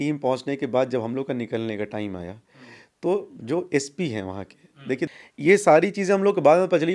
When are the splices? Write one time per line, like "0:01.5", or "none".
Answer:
0:05.1